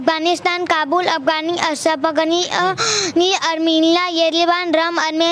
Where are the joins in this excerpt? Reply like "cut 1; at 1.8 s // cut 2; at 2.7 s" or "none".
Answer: none